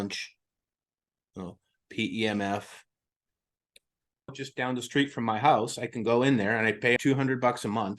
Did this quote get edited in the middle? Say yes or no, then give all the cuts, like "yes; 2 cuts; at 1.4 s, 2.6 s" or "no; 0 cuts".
yes; 2 cuts; at 4.3 s, 7.0 s